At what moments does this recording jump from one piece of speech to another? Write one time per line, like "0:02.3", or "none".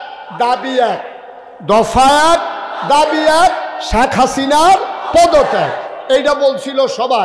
none